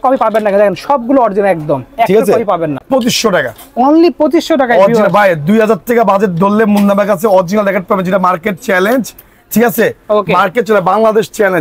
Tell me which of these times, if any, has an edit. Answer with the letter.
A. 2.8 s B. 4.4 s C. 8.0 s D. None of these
A